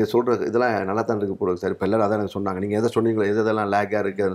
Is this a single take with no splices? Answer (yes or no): yes